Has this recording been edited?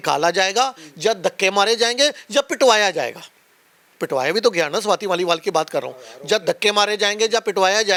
no; 0 cuts

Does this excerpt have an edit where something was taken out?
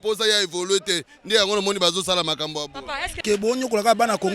yes; 1 cut; at 3.2 s

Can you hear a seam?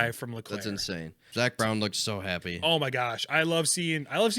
yes; 1 cut; at 1.3 s

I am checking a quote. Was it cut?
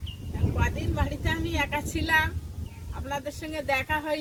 no; 0 cuts

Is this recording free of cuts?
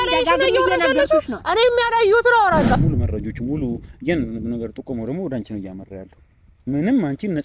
no; 1 cut; at 2.8 s

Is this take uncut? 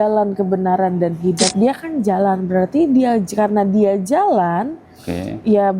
no; 1 cut; at 1.4 s

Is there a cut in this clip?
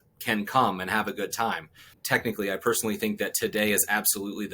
yes; 1 cut; at 2.0 s

